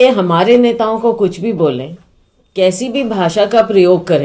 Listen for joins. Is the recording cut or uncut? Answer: uncut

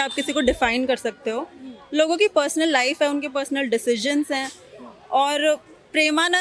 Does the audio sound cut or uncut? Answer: uncut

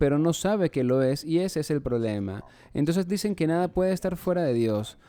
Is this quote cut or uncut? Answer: uncut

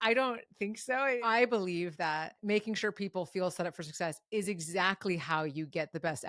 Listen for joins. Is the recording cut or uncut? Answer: cut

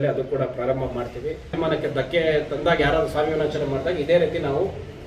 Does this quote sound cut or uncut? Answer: cut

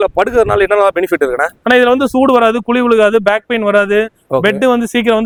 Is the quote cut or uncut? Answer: uncut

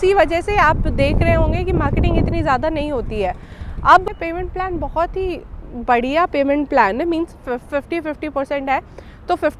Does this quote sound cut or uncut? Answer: cut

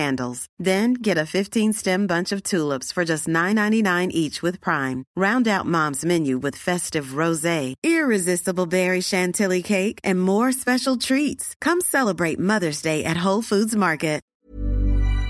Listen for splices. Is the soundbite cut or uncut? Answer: cut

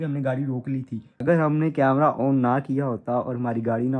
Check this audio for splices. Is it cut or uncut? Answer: cut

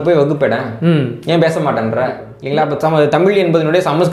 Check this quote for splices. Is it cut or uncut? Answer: cut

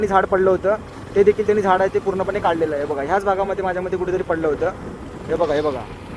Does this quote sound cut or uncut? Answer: uncut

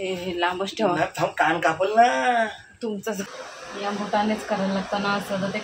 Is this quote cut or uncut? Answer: cut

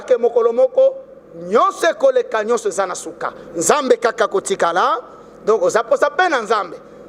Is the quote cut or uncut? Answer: uncut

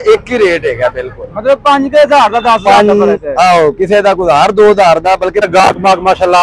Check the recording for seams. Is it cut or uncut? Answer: cut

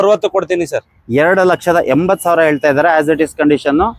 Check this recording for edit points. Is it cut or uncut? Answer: uncut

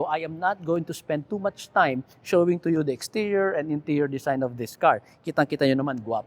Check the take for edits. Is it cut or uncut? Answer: uncut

